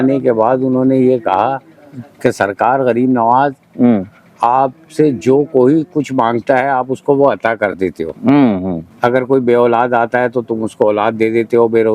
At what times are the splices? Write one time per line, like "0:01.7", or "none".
0:08.9